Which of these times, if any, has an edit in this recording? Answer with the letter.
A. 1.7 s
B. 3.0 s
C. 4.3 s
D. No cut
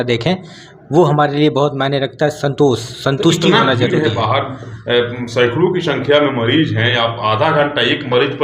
D